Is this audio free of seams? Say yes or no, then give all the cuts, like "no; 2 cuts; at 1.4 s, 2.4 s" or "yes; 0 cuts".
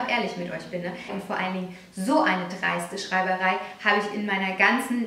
no; 1 cut; at 1.1 s